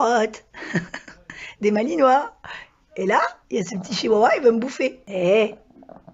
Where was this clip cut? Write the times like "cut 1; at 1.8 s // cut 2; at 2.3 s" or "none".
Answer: cut 1; at 5.0 s